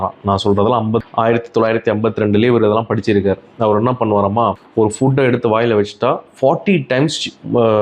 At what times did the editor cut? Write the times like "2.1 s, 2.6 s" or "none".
none